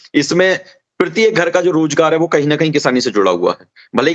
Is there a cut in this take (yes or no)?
no